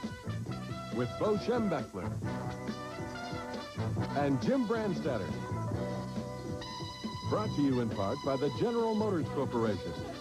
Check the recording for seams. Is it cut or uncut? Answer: cut